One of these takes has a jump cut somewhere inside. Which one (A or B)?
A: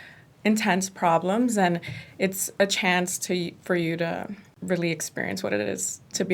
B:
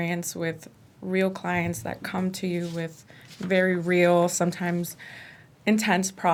A